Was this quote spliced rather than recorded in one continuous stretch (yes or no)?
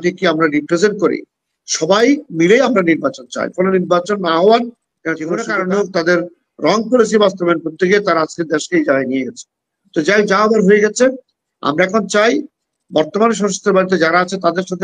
yes